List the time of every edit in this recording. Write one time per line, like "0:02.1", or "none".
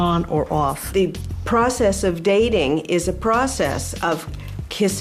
0:03.8